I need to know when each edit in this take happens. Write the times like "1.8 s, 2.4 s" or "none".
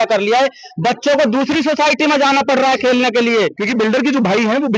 3.6 s